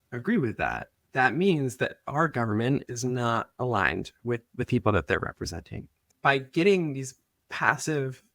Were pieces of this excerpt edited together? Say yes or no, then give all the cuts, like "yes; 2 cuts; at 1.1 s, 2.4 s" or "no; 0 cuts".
yes; 2 cuts; at 0.9 s, 6.1 s